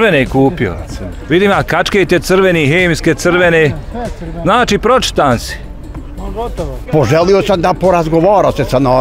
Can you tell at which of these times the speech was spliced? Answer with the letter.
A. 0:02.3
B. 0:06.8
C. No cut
B